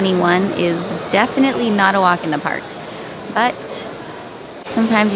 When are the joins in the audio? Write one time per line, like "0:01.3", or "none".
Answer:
none

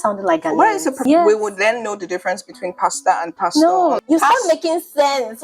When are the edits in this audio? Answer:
0:01.0
0:04.0

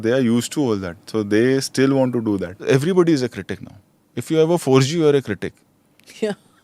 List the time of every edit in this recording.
0:02.6

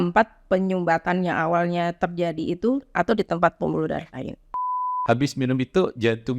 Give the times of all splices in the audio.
0:04.9

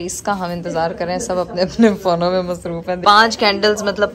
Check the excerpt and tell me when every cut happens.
0:03.0

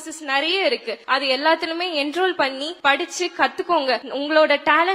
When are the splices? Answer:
0:00.9
0:02.7
0:04.1

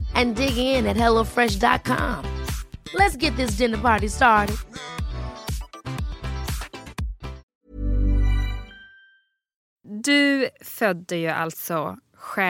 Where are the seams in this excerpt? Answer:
0:07.4
0:09.8

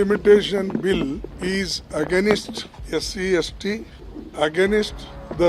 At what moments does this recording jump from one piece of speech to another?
none

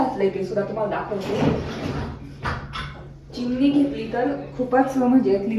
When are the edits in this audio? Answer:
none

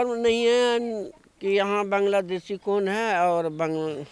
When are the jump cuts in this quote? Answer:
none

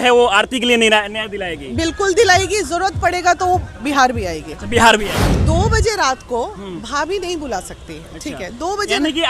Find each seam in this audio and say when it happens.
0:05.4

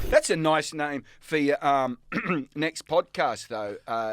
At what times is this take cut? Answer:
none

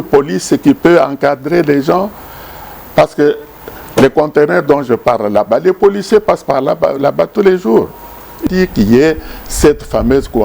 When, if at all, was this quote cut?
0:08.4

